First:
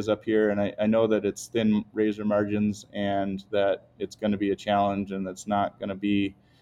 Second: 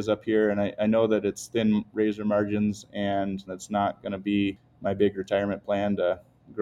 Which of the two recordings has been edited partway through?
second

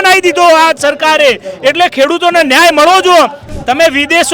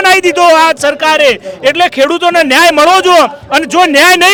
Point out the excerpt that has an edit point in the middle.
first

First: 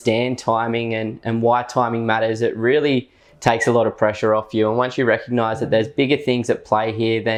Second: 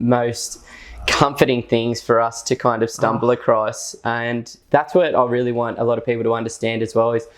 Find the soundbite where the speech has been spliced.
second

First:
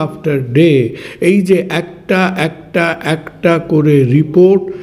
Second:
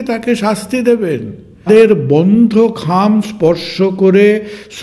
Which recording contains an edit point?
second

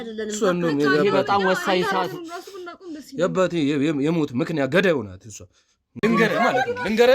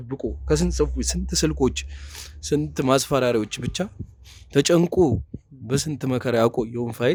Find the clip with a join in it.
first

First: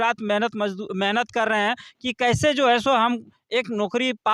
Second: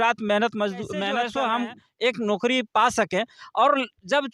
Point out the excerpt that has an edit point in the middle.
second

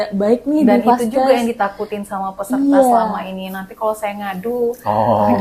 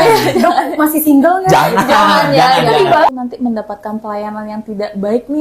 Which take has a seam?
second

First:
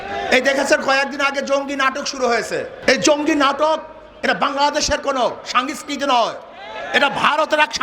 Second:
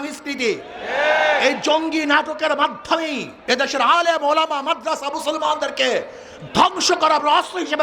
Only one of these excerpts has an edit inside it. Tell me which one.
first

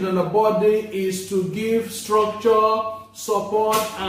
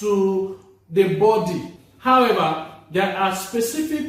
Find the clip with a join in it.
second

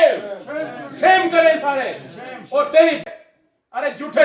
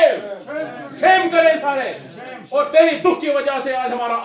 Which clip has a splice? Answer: first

